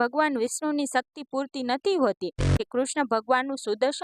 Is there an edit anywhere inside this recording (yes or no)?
yes